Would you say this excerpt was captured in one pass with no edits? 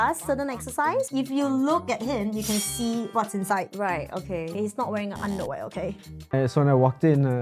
no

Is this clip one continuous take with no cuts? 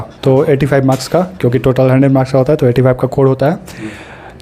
yes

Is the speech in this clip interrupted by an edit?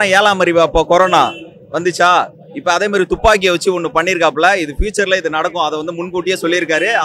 no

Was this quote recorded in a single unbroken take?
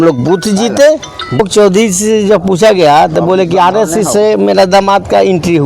no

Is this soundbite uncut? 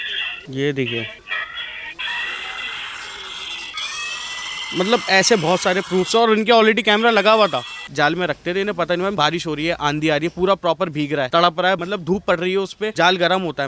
no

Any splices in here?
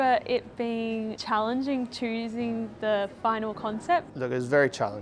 yes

